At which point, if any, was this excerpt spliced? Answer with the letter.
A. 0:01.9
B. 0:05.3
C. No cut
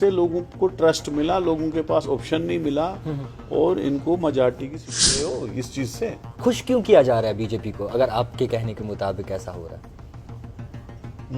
B